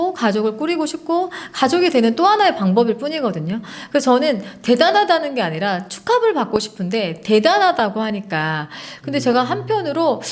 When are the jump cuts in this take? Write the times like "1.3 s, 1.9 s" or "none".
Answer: none